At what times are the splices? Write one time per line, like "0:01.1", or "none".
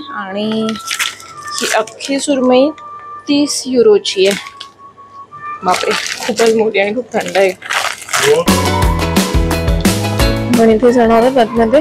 none